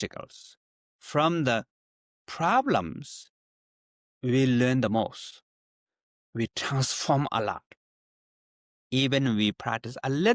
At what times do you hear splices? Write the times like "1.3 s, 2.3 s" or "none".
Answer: none